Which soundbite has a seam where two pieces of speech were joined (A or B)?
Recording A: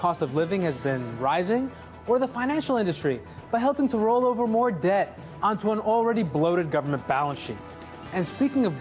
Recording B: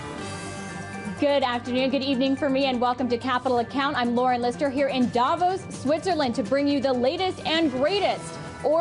A